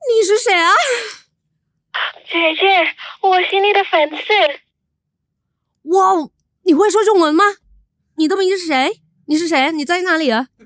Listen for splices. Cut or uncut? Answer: uncut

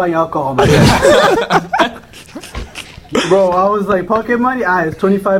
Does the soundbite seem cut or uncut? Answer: uncut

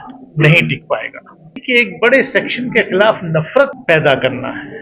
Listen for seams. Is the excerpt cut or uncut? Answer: cut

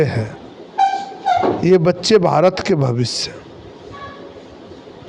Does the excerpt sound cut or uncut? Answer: uncut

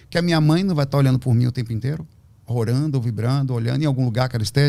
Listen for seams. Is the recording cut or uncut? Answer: uncut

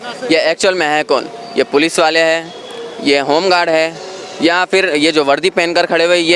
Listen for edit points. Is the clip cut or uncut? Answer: uncut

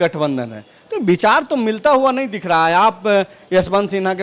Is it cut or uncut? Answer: uncut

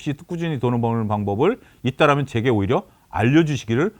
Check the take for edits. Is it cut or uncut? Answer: uncut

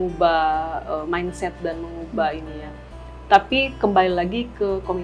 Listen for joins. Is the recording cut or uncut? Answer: uncut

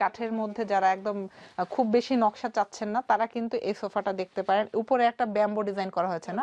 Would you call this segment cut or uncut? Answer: uncut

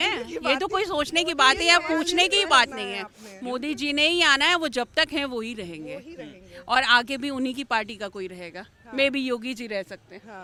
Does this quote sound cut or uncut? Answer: uncut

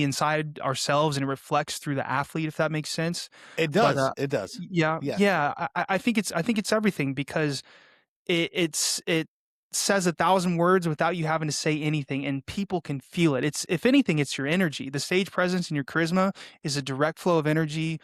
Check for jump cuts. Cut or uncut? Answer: uncut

